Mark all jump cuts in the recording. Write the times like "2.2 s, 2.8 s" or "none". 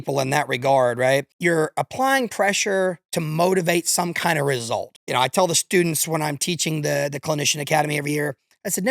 1.3 s, 5.0 s